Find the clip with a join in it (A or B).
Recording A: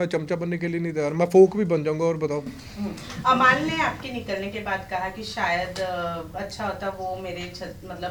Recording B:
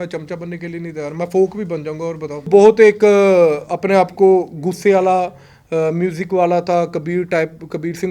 B